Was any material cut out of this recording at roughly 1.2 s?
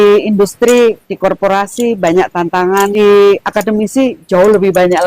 no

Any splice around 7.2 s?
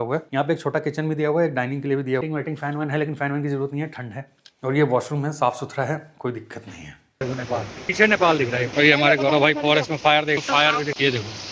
yes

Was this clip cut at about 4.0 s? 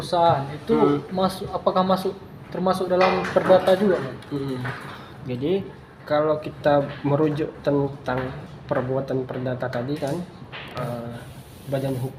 no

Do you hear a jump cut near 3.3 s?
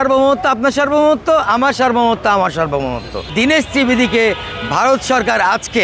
yes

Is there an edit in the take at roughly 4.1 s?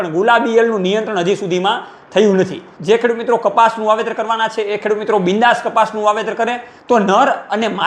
no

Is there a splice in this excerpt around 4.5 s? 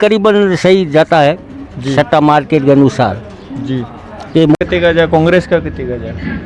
yes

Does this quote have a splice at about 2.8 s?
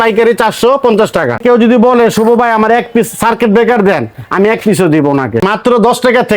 no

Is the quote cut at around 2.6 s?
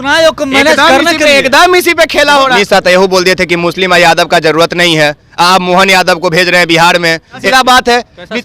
yes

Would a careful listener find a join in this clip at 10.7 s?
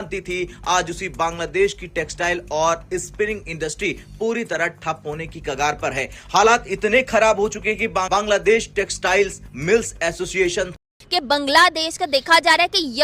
yes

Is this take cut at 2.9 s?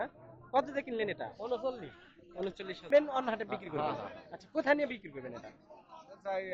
yes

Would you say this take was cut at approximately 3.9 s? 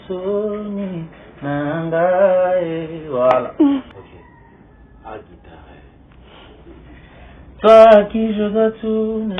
yes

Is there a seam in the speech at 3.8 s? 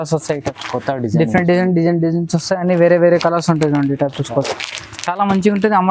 no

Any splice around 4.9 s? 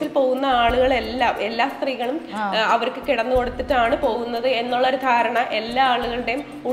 no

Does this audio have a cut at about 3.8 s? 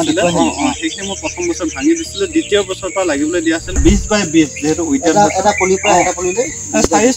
yes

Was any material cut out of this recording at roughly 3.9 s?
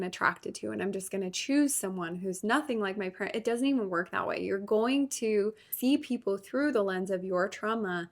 no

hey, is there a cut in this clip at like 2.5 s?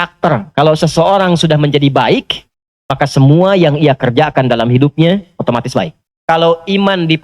no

